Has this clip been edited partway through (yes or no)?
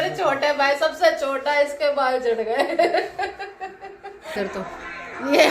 yes